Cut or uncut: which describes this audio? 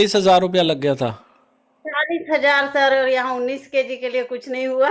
uncut